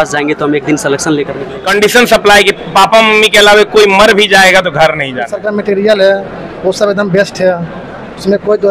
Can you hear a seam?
yes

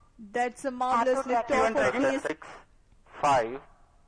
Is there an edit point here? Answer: yes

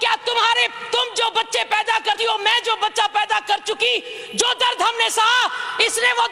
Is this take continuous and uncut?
yes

